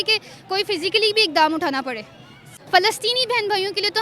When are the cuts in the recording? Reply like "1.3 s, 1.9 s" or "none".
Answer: 2.5 s